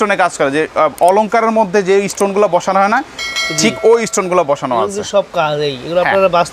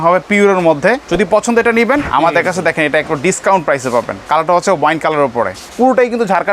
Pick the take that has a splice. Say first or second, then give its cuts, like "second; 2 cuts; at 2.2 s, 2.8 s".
second; 4 cuts; at 1.1 s, 2.1 s, 4.2 s, 5.6 s